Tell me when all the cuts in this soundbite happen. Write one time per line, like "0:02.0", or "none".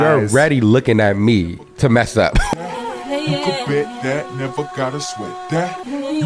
0:02.5

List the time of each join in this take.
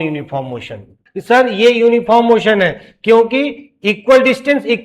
0:01.0

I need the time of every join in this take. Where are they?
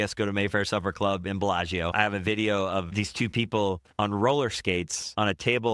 0:01.9

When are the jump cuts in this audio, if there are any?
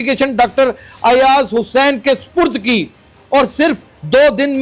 0:03.2

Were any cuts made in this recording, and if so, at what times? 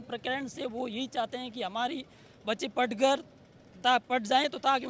none

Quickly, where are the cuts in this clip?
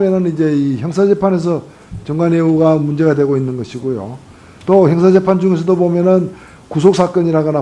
none

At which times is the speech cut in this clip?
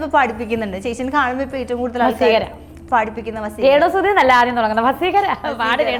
none

